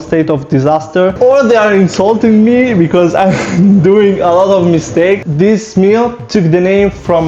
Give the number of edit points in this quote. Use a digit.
2